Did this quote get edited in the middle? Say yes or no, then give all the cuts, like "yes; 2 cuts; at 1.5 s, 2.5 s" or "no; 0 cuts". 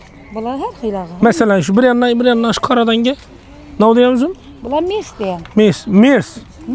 no; 0 cuts